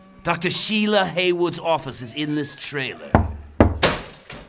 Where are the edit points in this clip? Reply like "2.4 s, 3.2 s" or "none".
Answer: 1.5 s